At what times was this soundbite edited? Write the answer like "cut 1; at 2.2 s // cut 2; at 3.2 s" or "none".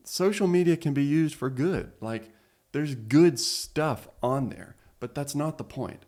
none